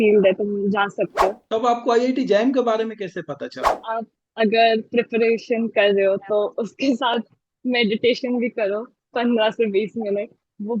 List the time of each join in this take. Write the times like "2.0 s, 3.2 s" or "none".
1.4 s, 3.8 s